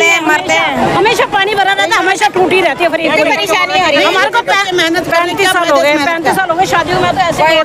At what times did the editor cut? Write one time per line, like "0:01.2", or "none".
none